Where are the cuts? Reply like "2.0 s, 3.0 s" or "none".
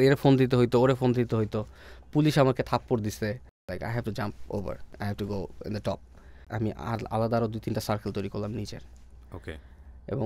3.7 s, 4.9 s, 6.5 s